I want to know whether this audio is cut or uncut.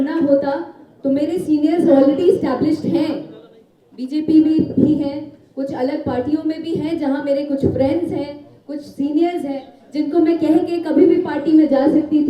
uncut